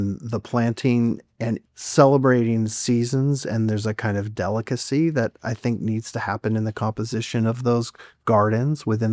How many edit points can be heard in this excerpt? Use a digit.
0